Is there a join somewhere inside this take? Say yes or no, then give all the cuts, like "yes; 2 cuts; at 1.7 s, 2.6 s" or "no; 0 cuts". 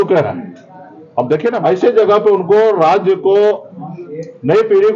yes; 1 cut; at 1.6 s